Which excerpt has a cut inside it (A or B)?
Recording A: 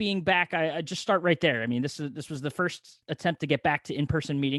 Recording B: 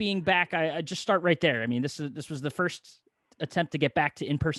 A